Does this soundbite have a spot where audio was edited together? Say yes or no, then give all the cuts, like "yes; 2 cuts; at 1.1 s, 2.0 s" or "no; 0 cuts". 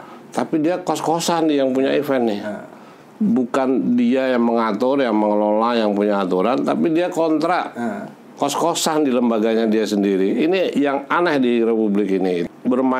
no; 0 cuts